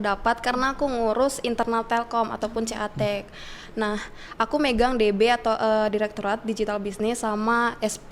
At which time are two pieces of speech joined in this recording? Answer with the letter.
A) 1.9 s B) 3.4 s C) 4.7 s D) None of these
D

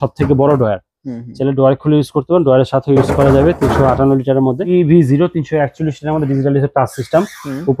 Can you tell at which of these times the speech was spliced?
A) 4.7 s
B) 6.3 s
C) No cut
A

